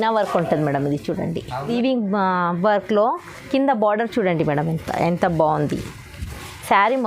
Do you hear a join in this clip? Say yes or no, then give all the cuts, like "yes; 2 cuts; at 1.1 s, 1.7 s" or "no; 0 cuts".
yes; 1 cut; at 1.7 s